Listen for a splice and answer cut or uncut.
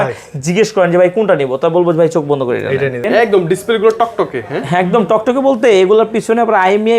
cut